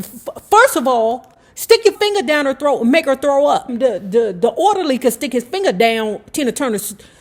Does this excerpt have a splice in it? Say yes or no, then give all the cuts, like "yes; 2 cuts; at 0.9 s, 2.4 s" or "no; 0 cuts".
yes; 2 cuts; at 2.0 s, 3.7 s